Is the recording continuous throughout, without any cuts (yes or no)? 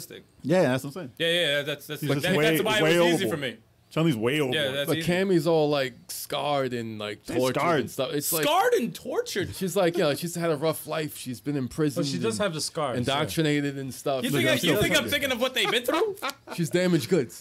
yes